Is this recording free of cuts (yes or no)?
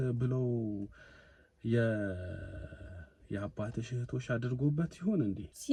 yes